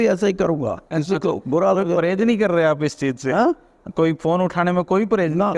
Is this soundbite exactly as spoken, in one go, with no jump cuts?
yes; 0 cuts

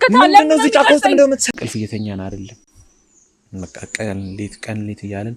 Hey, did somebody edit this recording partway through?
yes; 1 cut; at 1.4 s

